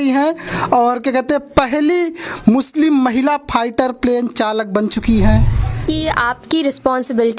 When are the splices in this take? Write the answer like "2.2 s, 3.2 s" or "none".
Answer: 5.8 s

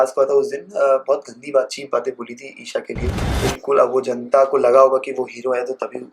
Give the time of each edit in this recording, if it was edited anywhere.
3.3 s

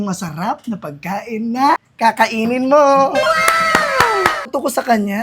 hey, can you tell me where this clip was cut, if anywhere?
1.9 s, 4.5 s

